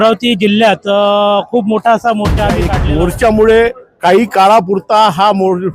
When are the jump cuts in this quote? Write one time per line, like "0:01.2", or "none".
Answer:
0:02.7